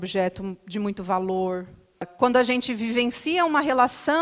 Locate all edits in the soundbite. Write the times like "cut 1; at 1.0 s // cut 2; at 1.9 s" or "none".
cut 1; at 2.1 s